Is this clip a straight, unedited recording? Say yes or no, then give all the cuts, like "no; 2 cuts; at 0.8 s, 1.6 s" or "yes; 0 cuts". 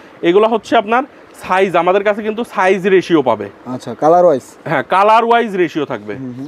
yes; 0 cuts